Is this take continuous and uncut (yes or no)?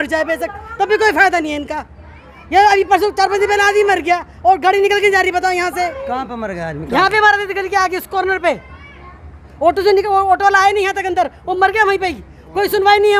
yes